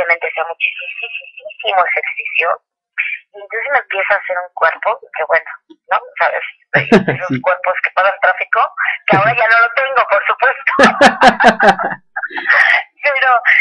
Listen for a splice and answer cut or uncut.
cut